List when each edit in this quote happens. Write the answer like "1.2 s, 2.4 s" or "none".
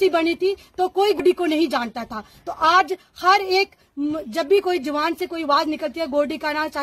1.2 s